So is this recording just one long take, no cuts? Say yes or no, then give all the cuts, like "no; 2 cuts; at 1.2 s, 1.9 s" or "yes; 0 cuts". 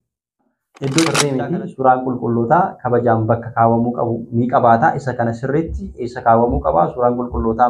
no; 1 cut; at 1.3 s